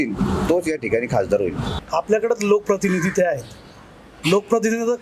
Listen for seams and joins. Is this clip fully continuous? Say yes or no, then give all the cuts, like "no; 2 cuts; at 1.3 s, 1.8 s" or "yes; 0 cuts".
no; 1 cut; at 1.7 s